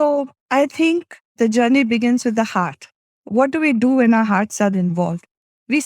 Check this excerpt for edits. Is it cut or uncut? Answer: cut